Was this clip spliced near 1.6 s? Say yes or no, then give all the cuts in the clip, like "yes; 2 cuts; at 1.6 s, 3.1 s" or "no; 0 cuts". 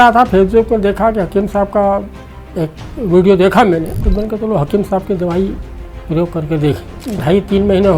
no; 2 cuts; at 4.0 s, 6.9 s